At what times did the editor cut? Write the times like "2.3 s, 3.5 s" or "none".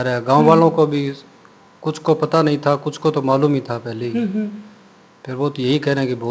none